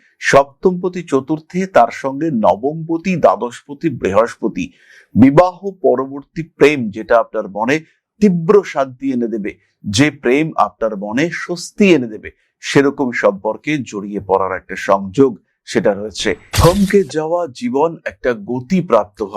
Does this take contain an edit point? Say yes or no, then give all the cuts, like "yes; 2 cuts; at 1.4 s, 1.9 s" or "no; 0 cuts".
yes; 1 cut; at 16.5 s